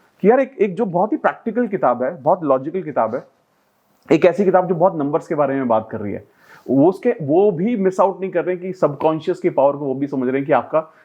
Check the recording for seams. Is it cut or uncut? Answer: uncut